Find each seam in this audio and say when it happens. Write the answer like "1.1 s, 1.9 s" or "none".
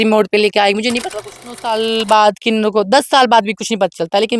1.5 s